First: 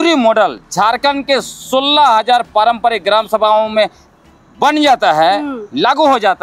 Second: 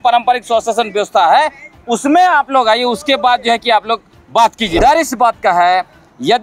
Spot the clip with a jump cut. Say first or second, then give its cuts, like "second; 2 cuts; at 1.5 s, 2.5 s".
second; 1 cut; at 4.8 s